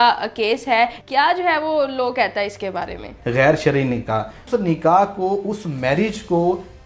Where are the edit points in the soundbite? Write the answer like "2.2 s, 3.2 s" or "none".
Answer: 1.0 s, 3.1 s, 4.4 s